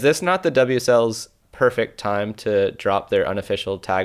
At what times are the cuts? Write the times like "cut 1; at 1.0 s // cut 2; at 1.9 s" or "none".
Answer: cut 1; at 1.4 s